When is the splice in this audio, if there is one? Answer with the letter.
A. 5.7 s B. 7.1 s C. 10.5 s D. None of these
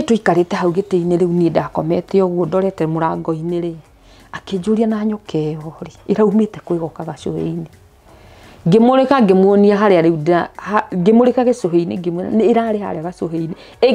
D